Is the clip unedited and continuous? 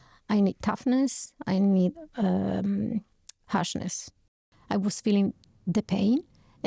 no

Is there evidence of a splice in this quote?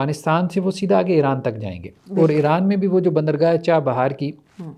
no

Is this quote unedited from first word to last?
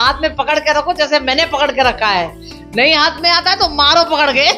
yes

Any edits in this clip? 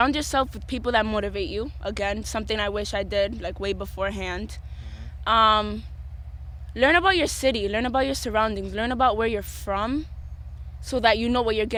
no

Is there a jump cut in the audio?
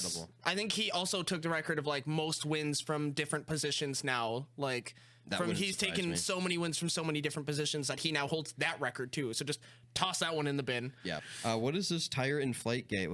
yes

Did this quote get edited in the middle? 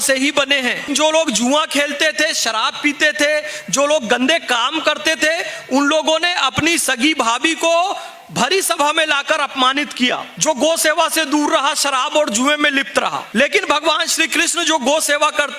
yes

